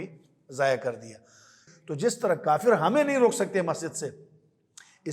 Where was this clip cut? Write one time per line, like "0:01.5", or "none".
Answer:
0:01.6